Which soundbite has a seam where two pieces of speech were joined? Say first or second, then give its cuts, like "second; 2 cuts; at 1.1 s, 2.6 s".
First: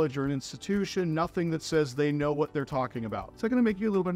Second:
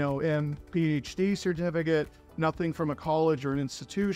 first; 1 cut; at 3.2 s